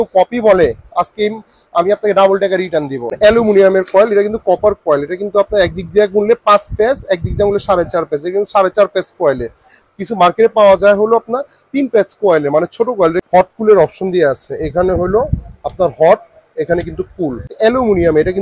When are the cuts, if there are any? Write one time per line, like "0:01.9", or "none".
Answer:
0:03.0
0:13.2
0:17.5